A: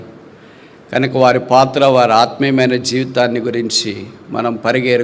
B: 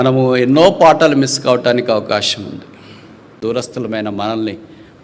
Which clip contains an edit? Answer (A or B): B